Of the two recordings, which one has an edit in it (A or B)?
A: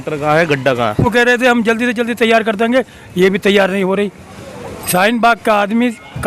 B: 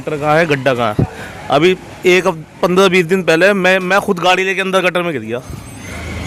A